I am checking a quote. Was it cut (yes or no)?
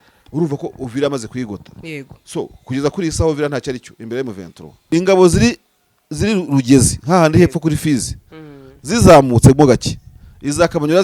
yes